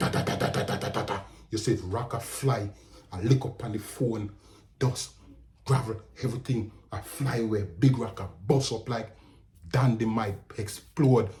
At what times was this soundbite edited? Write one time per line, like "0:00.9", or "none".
none